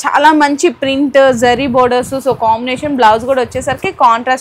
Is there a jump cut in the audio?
no; 0 cuts

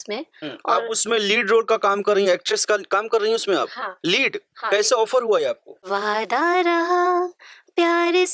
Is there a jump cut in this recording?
yes; 1 cut; at 5.7 s

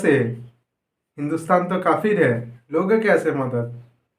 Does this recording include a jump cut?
yes; 1 cut; at 2.6 s

